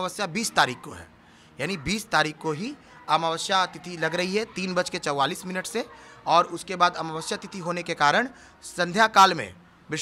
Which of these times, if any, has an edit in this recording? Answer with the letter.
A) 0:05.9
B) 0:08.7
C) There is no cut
C